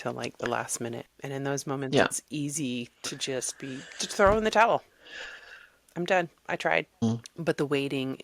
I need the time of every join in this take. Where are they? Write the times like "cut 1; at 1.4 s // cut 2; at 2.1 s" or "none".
cut 1; at 1.0 s // cut 2; at 7.0 s